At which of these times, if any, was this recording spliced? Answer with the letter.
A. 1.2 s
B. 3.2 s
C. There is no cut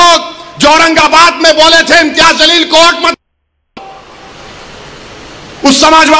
C